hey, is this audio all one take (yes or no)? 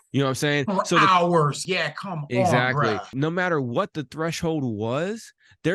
no